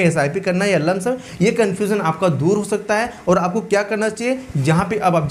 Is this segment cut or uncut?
uncut